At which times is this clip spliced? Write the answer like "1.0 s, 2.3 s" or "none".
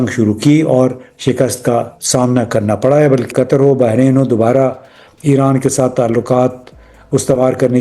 3.3 s